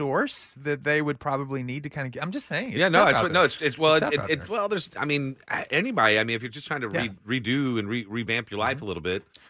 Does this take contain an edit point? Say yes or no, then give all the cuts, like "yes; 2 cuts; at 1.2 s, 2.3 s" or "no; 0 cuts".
no; 0 cuts